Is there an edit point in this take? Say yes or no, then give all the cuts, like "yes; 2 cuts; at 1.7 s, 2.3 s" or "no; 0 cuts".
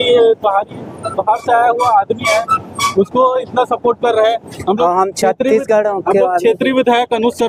no; 0 cuts